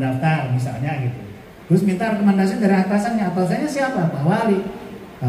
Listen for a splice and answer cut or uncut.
uncut